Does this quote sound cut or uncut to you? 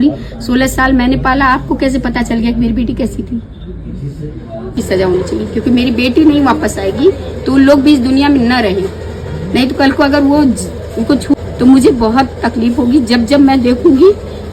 cut